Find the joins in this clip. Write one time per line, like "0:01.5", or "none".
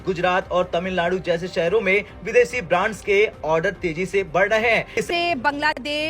0:05.0